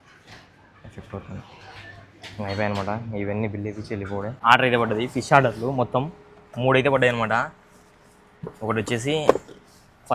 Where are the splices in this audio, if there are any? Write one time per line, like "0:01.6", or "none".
0:04.3